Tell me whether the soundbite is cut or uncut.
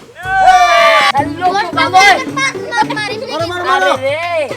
cut